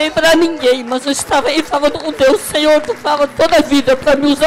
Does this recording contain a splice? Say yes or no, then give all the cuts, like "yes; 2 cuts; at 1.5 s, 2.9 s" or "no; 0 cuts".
no; 0 cuts